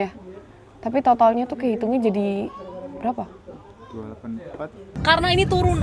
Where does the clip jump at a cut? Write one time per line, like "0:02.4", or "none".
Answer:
0:04.8